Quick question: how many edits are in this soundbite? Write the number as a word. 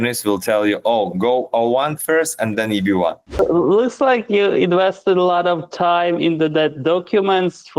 one